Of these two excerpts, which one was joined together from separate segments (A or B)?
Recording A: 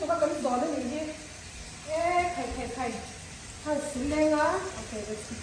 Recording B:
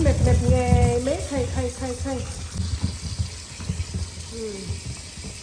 B